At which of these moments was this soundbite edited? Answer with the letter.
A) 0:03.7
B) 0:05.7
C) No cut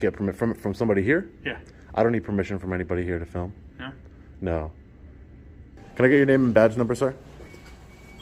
B